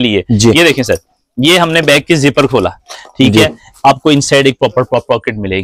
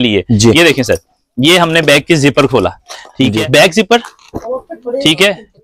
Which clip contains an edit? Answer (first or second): second